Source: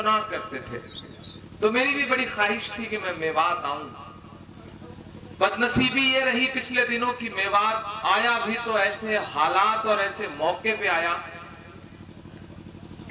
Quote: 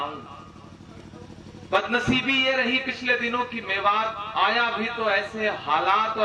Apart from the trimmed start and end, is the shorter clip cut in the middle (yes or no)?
no